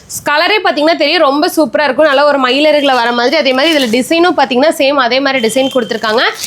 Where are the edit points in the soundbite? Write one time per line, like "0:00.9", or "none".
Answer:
none